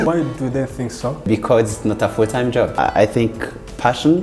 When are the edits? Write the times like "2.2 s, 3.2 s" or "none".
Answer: 1.3 s, 2.7 s